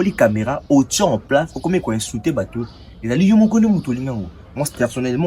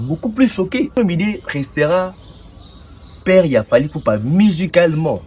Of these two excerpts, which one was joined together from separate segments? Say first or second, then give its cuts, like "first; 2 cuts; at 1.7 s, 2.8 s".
second; 1 cut; at 1.0 s